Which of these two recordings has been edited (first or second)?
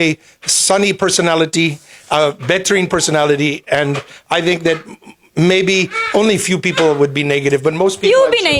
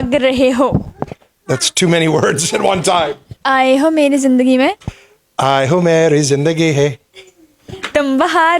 second